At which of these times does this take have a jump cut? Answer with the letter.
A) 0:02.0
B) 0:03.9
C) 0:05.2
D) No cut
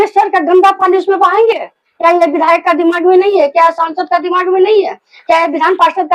D